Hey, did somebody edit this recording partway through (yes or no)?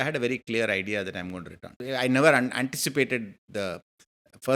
yes